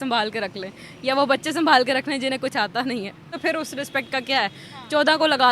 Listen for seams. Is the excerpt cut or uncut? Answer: cut